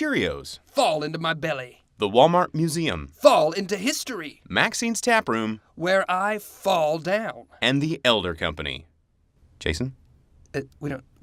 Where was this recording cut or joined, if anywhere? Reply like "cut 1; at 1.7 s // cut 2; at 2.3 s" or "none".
none